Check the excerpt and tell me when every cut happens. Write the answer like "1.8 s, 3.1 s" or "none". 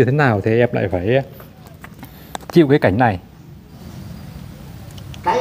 3.8 s